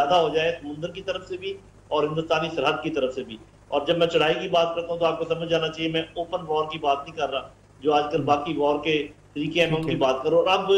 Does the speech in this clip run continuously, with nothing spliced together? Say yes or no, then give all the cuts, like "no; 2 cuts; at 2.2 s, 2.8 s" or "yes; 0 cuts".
yes; 0 cuts